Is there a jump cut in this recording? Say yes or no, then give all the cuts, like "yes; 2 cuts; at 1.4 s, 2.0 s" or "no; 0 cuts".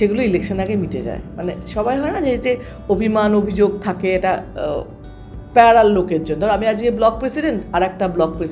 no; 0 cuts